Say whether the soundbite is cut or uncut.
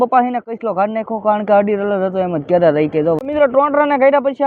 cut